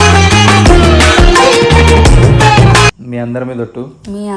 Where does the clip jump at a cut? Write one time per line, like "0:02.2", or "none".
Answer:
0:03.0